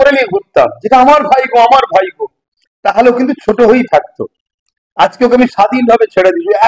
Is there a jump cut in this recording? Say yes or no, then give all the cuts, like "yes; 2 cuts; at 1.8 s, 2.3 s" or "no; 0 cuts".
no; 0 cuts